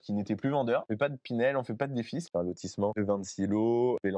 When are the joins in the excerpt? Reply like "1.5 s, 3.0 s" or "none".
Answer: 0.9 s, 2.3 s